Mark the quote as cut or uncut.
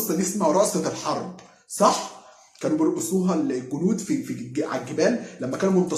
uncut